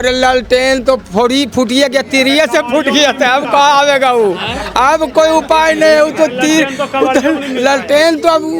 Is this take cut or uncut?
uncut